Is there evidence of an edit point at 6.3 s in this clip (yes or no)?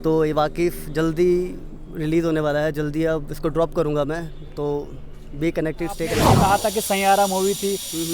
yes